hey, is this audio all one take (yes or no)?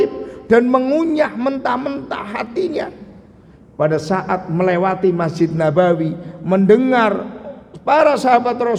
yes